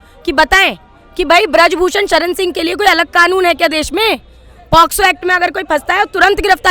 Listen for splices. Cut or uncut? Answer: uncut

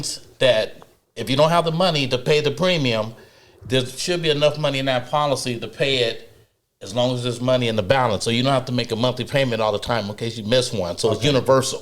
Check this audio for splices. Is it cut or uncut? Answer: uncut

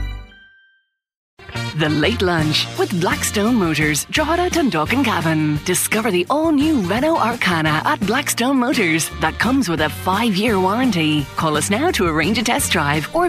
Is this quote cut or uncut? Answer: cut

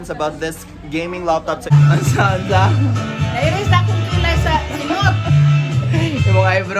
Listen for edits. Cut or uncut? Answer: cut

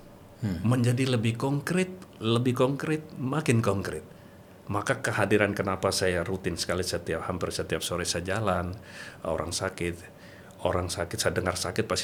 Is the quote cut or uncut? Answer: uncut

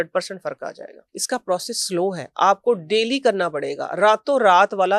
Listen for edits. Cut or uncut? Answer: cut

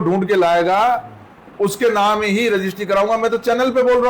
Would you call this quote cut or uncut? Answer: uncut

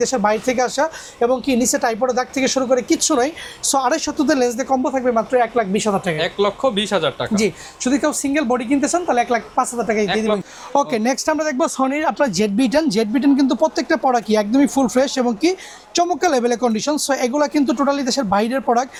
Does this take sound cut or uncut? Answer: uncut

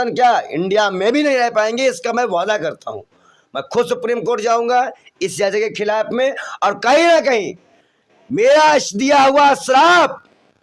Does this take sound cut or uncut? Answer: uncut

